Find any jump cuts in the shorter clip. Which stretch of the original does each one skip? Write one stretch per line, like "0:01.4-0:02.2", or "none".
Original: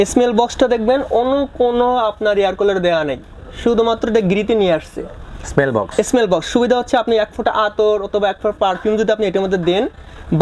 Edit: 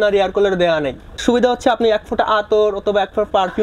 0:03.4-0:06.5